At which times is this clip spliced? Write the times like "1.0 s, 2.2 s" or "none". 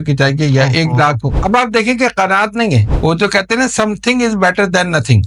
1.3 s, 2.9 s